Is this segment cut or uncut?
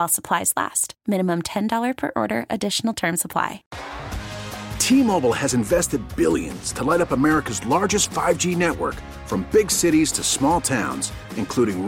cut